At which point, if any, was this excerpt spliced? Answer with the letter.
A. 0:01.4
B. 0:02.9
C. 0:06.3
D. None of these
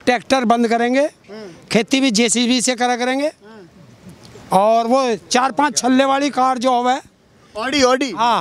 D